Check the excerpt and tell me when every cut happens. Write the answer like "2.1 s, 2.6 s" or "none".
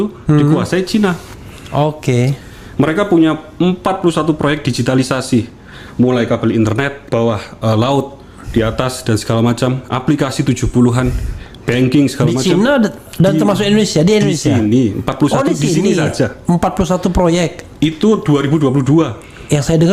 none